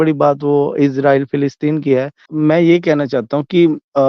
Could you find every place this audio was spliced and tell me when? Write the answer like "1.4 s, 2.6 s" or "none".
2.2 s

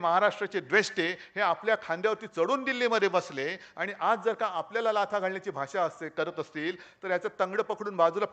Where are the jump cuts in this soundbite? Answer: none

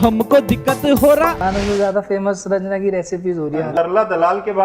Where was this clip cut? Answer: 1.4 s, 3.7 s

